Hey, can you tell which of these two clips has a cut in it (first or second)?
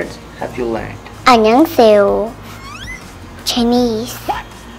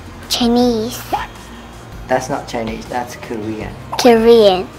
first